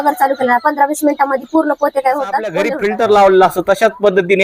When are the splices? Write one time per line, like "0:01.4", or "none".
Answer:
0:02.7